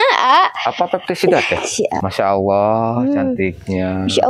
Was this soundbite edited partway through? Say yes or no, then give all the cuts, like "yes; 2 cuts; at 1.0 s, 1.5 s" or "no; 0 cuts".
yes; 1 cut; at 2.0 s